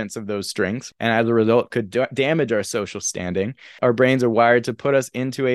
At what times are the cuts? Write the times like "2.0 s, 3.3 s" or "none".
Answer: 0.8 s, 3.7 s